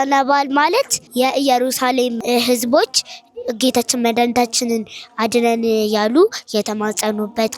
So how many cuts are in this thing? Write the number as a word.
two